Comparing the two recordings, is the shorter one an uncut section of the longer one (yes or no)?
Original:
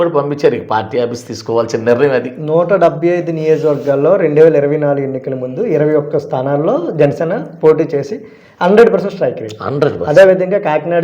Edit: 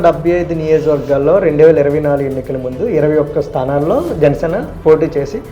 yes